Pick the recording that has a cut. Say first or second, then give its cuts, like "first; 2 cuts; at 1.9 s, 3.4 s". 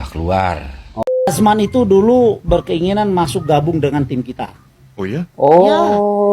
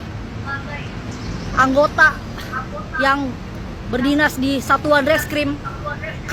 first; 2 cuts; at 1.3 s, 5.4 s